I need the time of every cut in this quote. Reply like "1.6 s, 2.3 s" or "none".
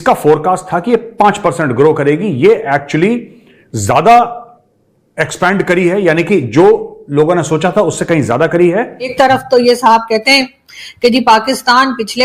9.1 s